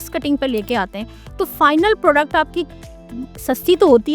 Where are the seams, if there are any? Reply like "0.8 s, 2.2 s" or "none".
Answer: none